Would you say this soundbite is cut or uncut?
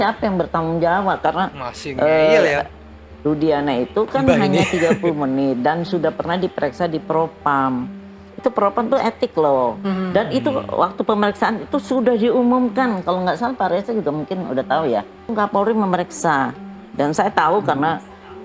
uncut